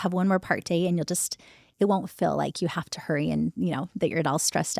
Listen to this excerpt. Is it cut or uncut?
uncut